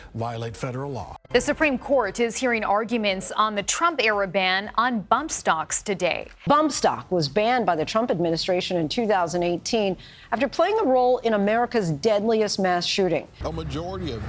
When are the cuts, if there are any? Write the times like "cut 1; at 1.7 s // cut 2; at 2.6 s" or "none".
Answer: cut 1; at 1.1 s // cut 2; at 6.4 s // cut 3; at 13.3 s